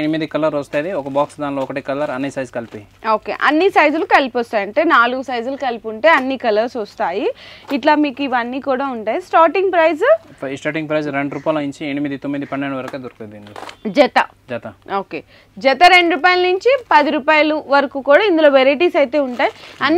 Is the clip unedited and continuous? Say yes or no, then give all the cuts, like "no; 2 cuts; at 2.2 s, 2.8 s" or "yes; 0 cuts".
yes; 0 cuts